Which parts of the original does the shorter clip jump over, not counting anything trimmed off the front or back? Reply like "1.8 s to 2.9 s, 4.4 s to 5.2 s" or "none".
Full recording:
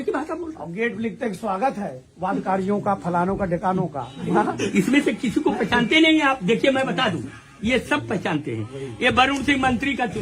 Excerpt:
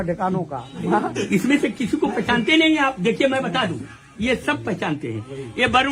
none